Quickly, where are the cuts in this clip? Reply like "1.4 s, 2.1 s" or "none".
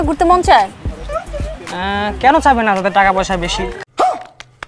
3.7 s